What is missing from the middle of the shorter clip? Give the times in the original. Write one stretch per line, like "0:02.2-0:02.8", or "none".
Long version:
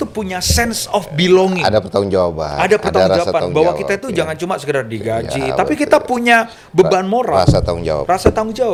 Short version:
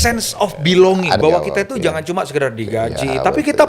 0:01.7-0:03.5

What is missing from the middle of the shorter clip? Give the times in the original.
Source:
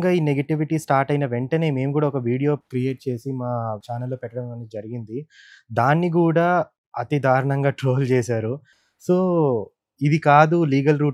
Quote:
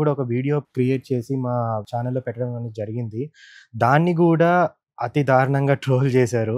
none

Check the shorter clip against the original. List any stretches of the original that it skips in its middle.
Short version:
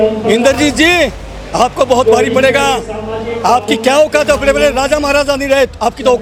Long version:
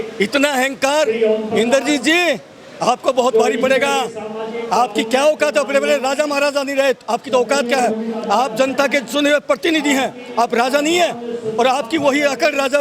none

